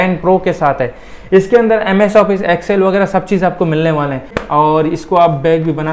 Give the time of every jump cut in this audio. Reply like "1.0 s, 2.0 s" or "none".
4.4 s